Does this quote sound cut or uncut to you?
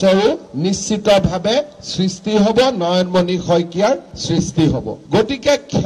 uncut